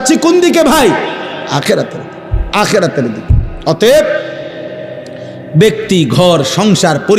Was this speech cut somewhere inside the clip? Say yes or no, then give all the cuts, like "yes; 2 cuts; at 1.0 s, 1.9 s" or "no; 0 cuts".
no; 0 cuts